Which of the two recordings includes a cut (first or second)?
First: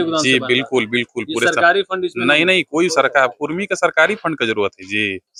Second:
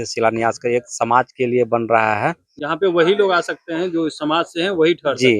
second